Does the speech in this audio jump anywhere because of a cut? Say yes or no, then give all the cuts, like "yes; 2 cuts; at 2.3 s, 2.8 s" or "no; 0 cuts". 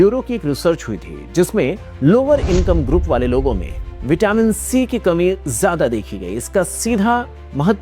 no; 0 cuts